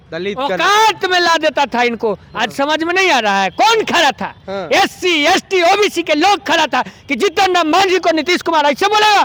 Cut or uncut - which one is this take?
uncut